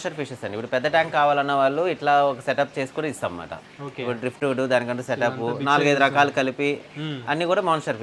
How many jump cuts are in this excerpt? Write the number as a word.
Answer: zero